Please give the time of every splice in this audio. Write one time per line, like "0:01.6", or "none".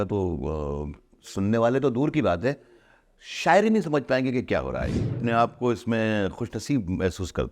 0:05.2